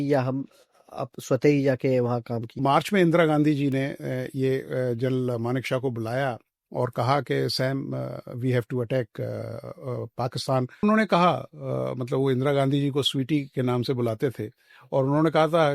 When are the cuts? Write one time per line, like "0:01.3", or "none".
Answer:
0:02.6
0:10.8